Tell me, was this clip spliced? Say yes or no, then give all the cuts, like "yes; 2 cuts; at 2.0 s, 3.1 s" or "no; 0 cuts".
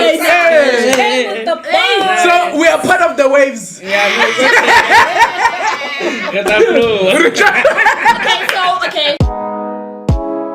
yes; 1 cut; at 9.2 s